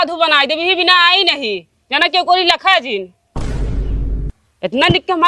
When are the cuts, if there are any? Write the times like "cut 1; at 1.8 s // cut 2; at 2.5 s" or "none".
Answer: none